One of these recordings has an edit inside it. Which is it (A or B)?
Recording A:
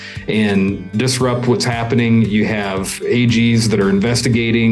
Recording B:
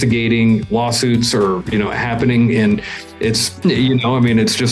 B